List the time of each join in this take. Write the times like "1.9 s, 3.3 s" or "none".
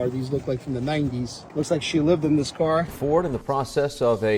1.4 s, 2.9 s